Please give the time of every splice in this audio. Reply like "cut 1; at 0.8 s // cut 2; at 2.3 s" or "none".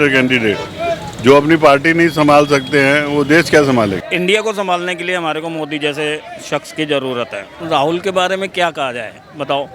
cut 1; at 4.0 s // cut 2; at 7.5 s